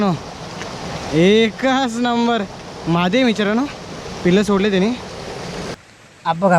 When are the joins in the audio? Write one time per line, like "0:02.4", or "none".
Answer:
0:05.6